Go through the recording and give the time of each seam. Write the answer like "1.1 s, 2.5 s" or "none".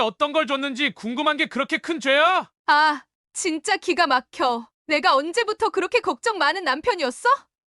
2.5 s